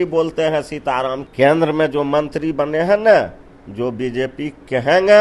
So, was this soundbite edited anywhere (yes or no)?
yes